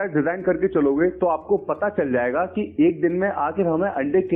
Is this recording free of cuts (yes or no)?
yes